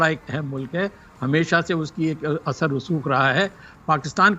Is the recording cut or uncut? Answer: uncut